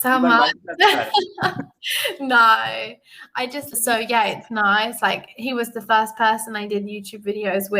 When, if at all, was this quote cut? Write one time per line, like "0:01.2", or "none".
0:03.7